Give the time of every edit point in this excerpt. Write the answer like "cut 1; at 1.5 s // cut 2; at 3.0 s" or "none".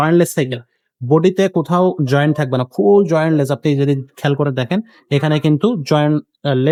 none